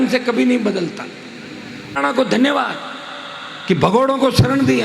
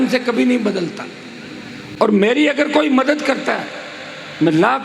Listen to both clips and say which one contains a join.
first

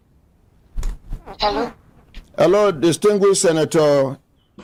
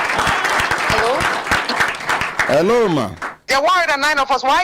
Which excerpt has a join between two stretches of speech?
second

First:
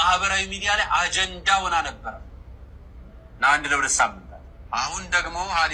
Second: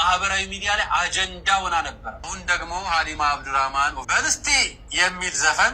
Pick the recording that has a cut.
second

